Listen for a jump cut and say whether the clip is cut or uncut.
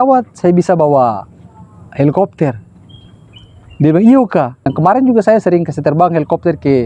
uncut